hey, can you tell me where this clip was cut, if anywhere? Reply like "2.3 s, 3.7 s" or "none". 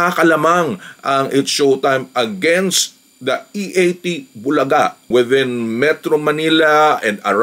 5.0 s